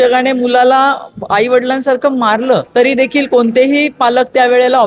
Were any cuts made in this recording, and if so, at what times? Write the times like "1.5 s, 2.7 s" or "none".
2.7 s